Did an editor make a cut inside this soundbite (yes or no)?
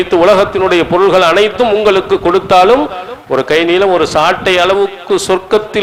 no